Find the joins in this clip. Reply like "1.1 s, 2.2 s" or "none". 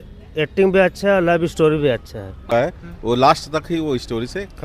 2.5 s